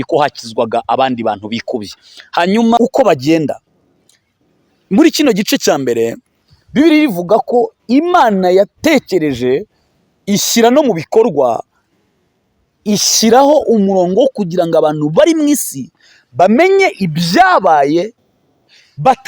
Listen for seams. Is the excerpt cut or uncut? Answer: cut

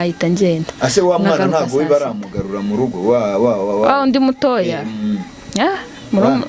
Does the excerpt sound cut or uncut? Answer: uncut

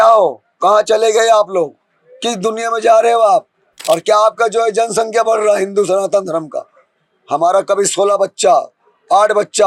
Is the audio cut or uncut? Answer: cut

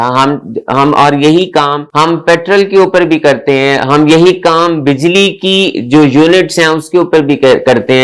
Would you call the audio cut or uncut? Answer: uncut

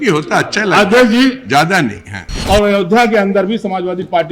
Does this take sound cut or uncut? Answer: cut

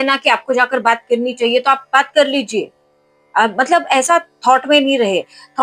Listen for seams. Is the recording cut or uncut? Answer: uncut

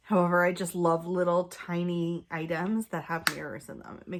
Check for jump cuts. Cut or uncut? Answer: uncut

